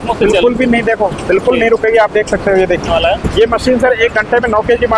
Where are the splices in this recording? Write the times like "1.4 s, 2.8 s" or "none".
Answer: 2.9 s